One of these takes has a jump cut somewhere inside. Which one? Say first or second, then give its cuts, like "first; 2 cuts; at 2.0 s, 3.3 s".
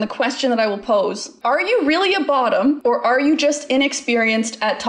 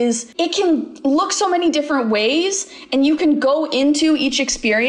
first; 2 cuts; at 1.3 s, 2.8 s